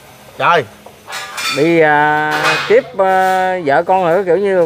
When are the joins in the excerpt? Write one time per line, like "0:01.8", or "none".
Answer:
none